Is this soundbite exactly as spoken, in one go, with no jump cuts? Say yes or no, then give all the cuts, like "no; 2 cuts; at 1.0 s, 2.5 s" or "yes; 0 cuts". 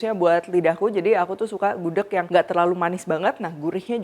no; 1 cut; at 2.3 s